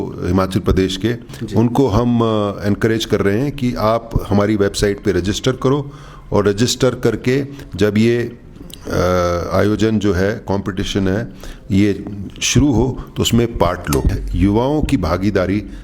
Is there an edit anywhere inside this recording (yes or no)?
yes